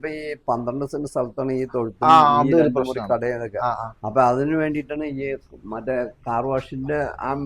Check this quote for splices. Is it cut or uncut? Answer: uncut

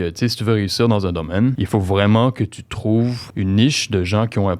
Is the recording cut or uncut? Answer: cut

